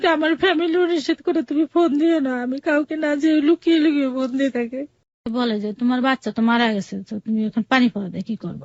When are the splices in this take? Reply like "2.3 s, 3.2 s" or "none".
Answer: 5.3 s